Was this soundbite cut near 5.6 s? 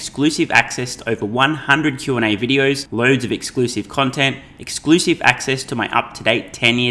no; 0 cuts

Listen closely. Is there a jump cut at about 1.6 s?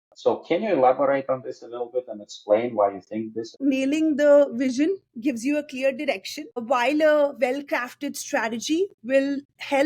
no; 2 cuts; at 3.5 s, 6.6 s

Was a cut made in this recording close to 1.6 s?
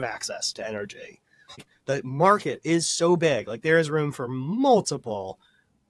yes; 1 cut; at 1.6 s

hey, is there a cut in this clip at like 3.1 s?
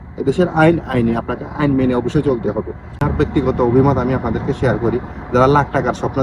yes; 1 cut; at 3.1 s

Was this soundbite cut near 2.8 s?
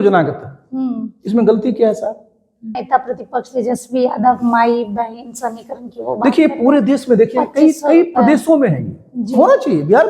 yes; 1 cut; at 2.8 s

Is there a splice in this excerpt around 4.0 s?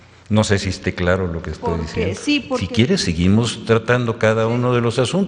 no; 1 cut; at 2.6 s

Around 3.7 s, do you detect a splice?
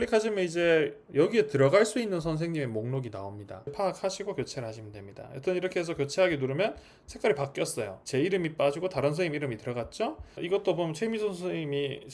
yes; 2 cuts; at 3.7 s, 10.2 s

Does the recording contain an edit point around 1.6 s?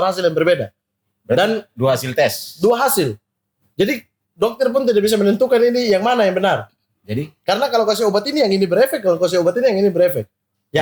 no; 0 cuts

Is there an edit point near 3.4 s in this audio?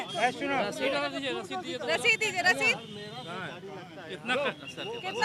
no; 0 cuts

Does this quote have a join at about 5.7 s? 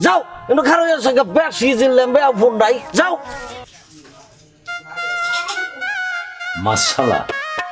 no; 1 cut; at 3.7 s

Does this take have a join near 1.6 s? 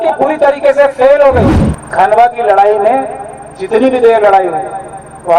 yes; 1 cut; at 1.6 s

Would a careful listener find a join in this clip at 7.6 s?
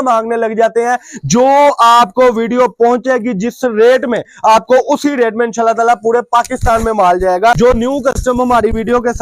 yes; 1 cut; at 7.6 s

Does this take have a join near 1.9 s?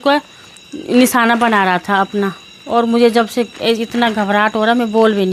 no; 0 cuts

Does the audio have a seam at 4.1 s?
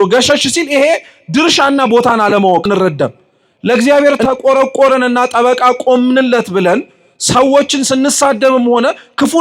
no; 1 cut; at 2.7 s

